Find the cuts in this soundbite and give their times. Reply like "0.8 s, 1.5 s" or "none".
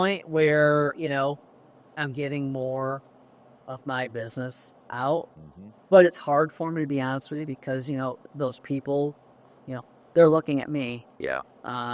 none